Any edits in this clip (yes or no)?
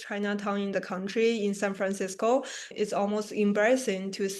yes